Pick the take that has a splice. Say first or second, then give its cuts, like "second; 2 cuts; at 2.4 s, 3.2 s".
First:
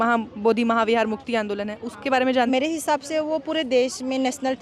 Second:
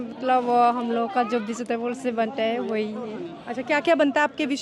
first; 1 cut; at 2.5 s